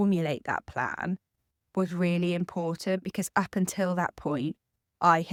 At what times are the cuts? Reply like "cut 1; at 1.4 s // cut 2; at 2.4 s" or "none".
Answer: none